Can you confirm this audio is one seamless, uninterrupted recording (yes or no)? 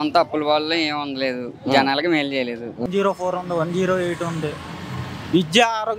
no